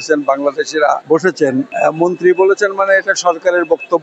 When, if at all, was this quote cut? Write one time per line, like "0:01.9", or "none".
0:01.0
0:01.7